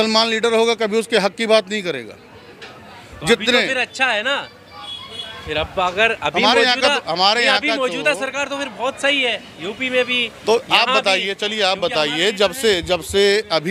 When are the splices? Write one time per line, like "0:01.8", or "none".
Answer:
none